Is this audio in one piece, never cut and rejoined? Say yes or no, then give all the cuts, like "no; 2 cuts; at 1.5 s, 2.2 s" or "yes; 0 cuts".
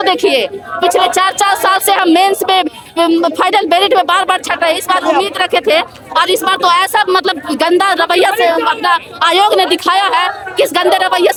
yes; 0 cuts